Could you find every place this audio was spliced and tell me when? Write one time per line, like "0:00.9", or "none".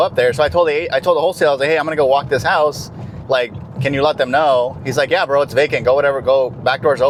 none